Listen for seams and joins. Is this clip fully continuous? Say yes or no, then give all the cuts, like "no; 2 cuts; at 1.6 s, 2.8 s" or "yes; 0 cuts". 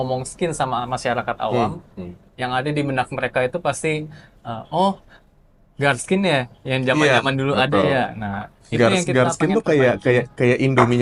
yes; 0 cuts